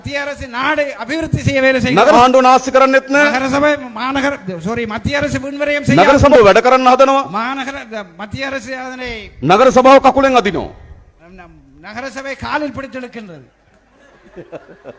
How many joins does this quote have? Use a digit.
2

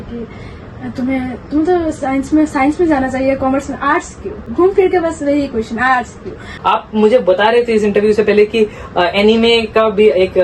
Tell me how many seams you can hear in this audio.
2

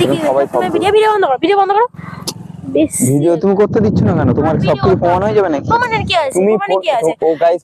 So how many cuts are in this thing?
0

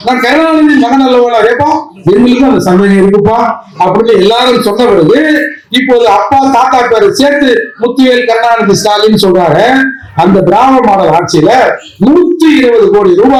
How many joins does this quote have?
0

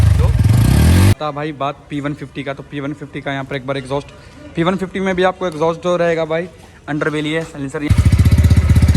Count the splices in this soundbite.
2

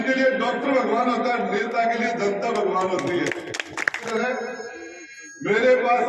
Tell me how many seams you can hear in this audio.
1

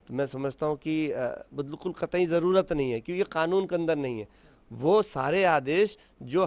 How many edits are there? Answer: 0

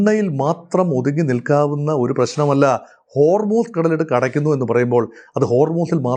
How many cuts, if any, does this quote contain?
0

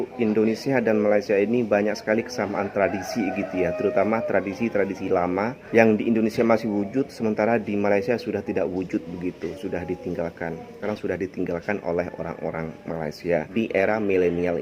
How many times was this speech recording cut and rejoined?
3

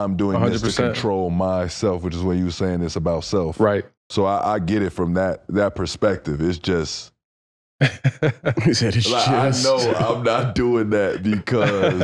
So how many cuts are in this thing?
1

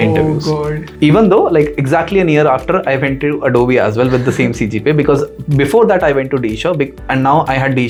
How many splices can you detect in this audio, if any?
0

